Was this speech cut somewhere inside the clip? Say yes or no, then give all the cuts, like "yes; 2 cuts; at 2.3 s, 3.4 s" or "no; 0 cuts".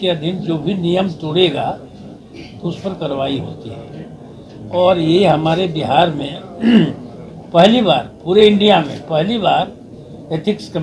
no; 0 cuts